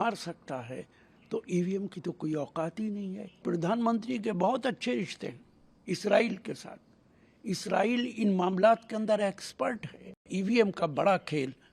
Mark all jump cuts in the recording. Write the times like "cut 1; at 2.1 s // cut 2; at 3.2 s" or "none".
cut 1; at 3.4 s // cut 2; at 10.3 s